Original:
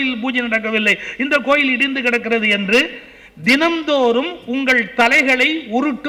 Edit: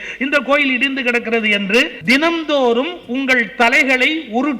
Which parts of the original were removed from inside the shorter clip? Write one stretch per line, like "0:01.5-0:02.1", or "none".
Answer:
0:02.9-0:03.3